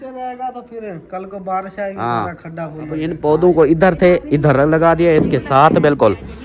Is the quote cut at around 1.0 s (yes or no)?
no